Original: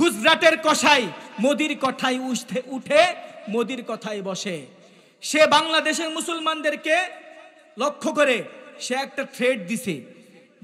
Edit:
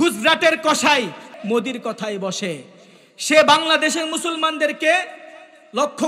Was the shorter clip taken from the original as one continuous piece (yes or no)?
no